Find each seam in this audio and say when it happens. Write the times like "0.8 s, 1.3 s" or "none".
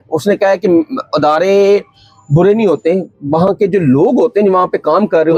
none